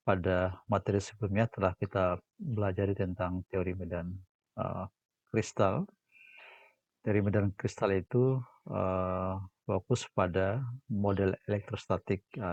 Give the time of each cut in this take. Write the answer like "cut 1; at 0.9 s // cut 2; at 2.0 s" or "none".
none